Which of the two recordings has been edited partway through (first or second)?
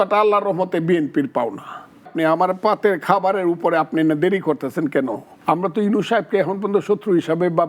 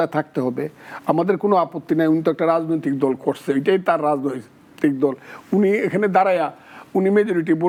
first